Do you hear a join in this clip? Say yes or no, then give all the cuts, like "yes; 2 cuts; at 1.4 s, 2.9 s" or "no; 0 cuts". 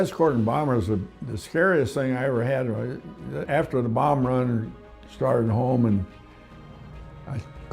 yes; 1 cut; at 3.4 s